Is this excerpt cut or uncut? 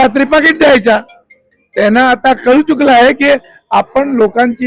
uncut